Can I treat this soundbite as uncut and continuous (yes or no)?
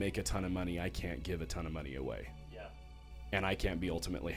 yes